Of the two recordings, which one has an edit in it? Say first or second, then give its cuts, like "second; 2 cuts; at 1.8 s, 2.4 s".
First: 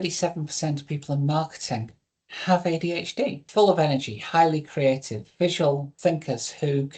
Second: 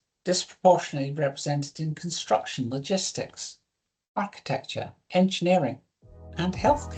first; 2 cuts; at 3.4 s, 5.9 s